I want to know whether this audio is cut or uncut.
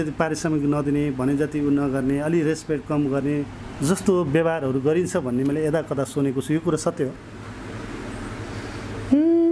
uncut